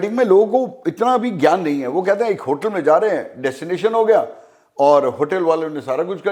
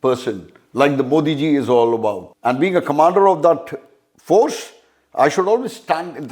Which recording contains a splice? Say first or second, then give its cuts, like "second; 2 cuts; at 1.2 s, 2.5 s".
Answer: second; 1 cut; at 2.3 s